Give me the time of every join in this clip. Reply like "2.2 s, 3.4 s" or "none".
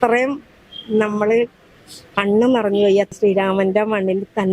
3.1 s